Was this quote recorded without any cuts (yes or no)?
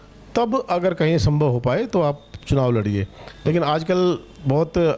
yes